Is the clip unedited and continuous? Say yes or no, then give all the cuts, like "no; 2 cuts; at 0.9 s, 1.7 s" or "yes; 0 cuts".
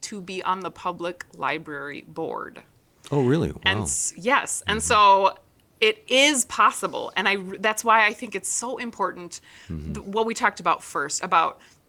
yes; 0 cuts